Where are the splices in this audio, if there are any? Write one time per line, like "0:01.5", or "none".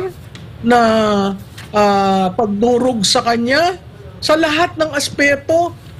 none